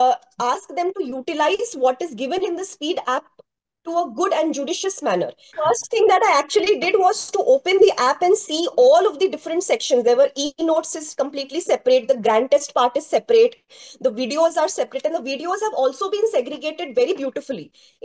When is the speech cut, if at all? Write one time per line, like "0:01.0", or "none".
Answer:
0:05.5